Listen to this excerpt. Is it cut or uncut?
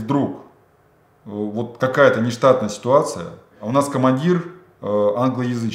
cut